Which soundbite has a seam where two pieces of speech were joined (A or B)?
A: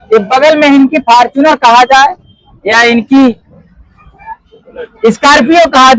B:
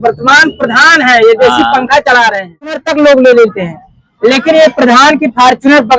B